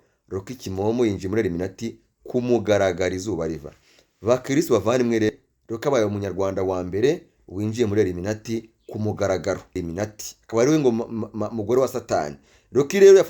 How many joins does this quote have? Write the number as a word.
two